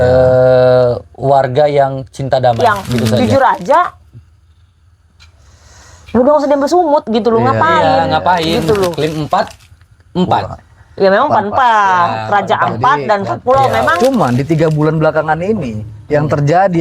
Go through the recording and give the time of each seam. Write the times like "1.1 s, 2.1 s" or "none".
2.9 s, 9.0 s, 14.0 s